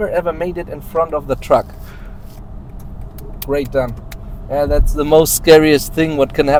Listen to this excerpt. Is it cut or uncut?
uncut